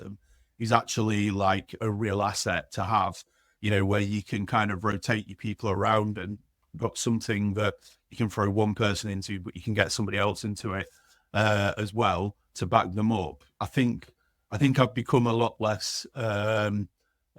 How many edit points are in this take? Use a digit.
0